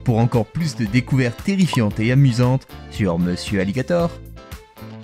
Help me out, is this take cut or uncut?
cut